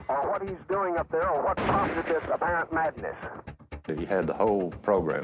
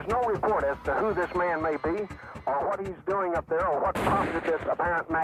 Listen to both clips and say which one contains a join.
first; 1 cut; at 3.8 s

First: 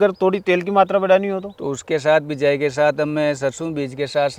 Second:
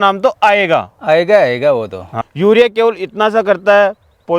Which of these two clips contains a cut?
second; 1 cut; at 2.0 s

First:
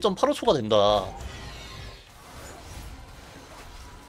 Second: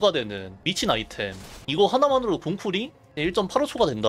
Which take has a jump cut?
first; 1 cut; at 2.1 s

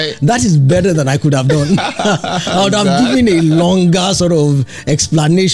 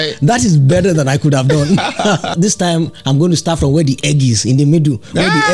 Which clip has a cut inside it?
second; 1 cut; at 2.3 s

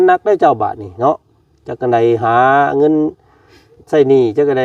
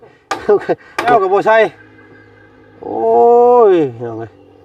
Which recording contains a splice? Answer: second; 1 cut; at 1.1 s

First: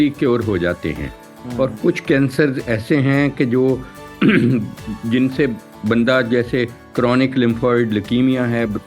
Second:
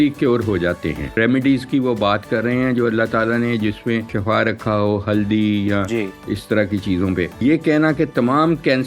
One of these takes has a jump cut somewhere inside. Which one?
second; 3 cuts; at 1.1 s, 4.1 s, 7.3 s

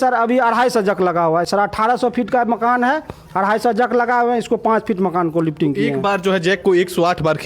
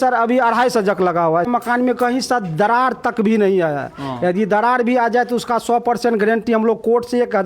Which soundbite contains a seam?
second; 1 cut; at 1.5 s

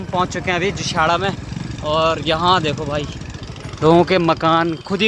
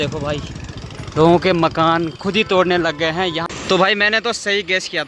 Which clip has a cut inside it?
second; 1 cut; at 3.4 s

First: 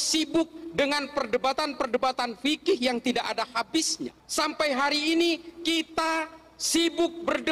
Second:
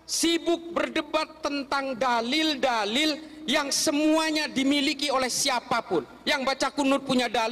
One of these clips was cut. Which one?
first; 1 cut; at 4.2 s

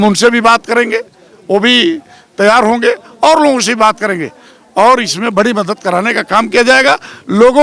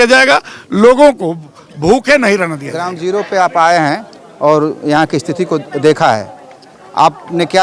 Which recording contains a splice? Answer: second; 1 cut; at 2.9 s

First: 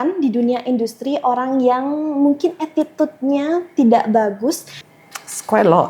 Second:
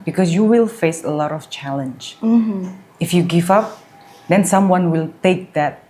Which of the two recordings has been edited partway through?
first; 1 cut; at 4.7 s

